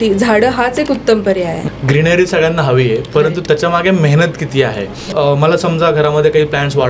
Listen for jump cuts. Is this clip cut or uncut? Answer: cut